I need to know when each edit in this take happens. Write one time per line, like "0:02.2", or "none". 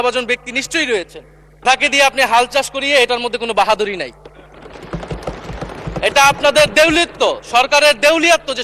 0:01.6